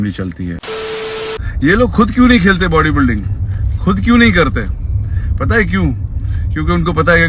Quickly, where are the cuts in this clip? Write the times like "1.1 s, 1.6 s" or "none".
1.0 s